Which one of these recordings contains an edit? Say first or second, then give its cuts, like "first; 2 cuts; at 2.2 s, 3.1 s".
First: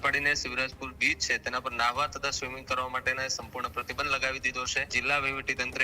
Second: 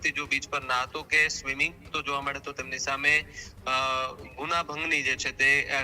first; 1 cut; at 4.9 s